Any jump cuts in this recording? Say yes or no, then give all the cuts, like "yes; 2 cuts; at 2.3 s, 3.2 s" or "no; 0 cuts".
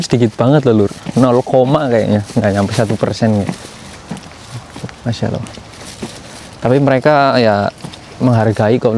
no; 0 cuts